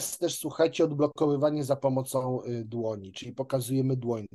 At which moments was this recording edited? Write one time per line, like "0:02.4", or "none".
none